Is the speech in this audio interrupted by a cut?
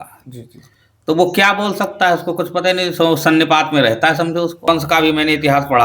yes; 1 cut; at 4.7 s

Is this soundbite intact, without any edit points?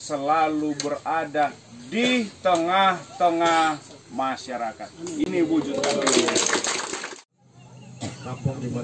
no; 1 cut; at 7.0 s

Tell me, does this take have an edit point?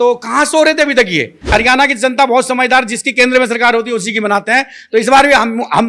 yes; 1 cut; at 1.5 s

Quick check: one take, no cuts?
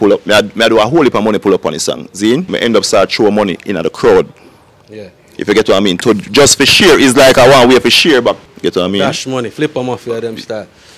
no; 2 cuts; at 2.5 s, 8.5 s

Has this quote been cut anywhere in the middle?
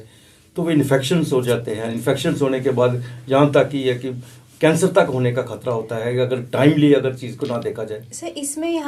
no; 0 cuts

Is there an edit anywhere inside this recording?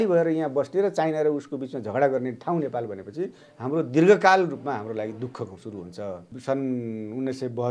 yes; 1 cut; at 6.3 s

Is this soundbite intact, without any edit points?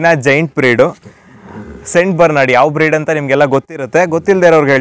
yes; 0 cuts

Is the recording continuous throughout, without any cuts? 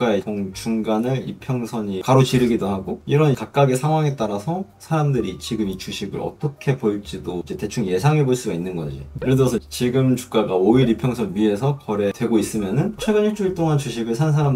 yes; 0 cuts

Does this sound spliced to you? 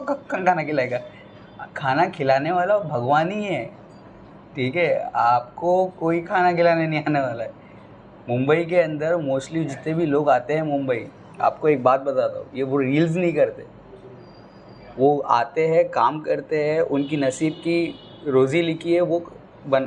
no; 0 cuts

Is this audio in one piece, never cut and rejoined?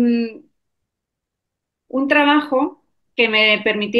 yes; 0 cuts

